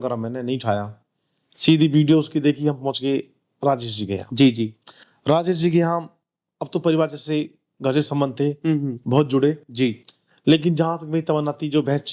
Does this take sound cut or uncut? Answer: uncut